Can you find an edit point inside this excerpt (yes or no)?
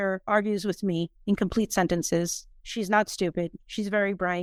no